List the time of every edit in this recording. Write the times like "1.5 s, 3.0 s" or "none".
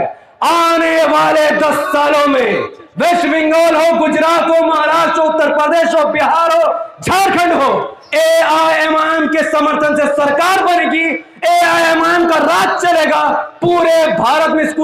none